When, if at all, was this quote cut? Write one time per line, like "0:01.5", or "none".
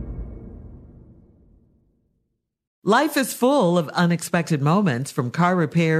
0:02.7